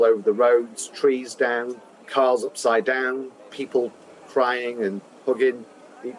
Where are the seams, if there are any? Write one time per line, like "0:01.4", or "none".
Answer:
0:02.0
0:03.5